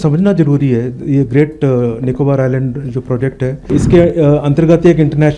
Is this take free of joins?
no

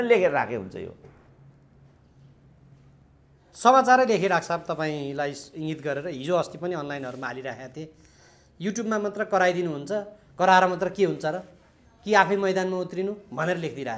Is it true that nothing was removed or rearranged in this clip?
yes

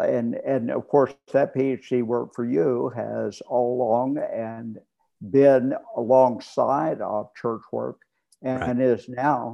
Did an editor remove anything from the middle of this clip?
no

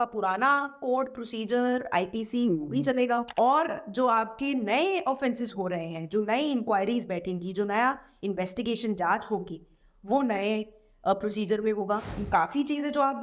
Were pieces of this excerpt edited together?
yes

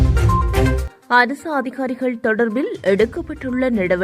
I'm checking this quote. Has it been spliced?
no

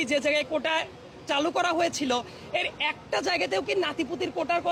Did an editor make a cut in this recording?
no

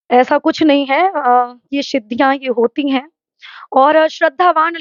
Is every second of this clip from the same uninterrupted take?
yes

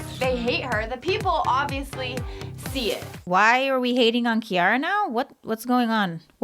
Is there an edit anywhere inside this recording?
yes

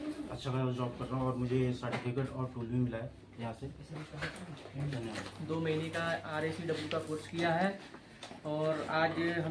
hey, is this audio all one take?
no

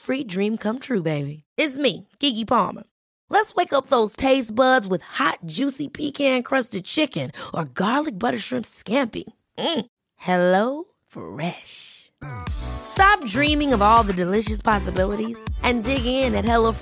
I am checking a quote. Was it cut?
no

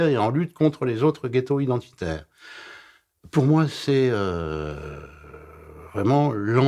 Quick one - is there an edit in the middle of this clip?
no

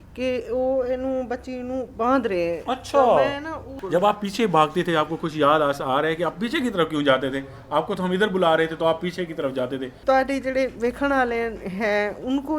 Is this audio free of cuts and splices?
no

